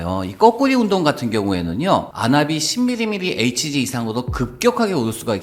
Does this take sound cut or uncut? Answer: uncut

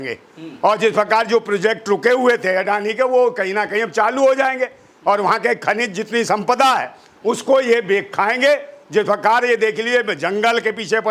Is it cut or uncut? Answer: uncut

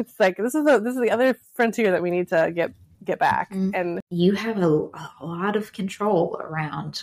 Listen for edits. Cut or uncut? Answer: cut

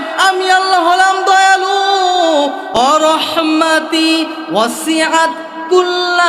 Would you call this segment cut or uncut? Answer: cut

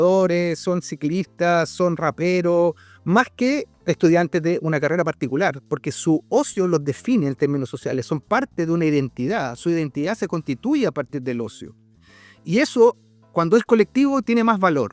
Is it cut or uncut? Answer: uncut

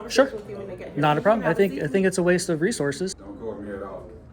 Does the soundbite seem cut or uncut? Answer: cut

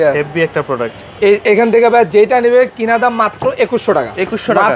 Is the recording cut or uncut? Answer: uncut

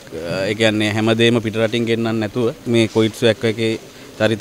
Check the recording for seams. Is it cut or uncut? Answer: cut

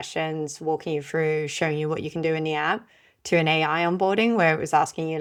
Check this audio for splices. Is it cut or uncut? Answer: uncut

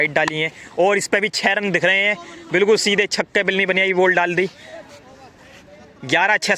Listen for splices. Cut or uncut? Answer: uncut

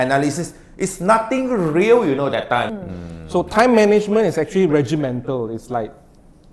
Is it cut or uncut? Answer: cut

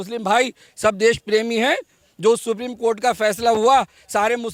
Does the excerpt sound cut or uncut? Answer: uncut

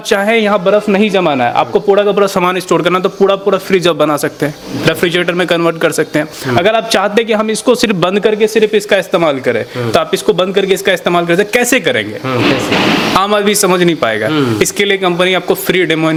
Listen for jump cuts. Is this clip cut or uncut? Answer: uncut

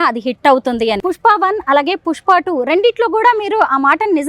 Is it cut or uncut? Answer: cut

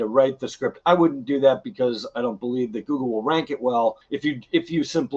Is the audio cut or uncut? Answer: cut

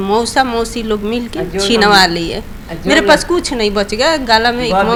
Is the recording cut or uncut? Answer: uncut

